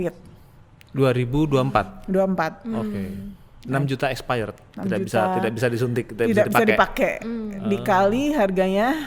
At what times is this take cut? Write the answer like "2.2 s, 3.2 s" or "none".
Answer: none

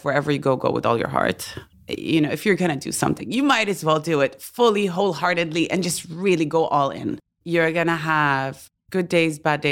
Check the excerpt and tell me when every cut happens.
1.7 s, 7.2 s

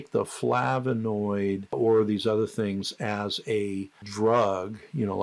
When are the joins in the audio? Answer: 1.7 s, 4.0 s

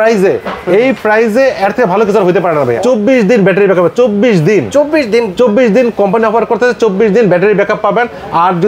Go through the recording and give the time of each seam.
2.8 s

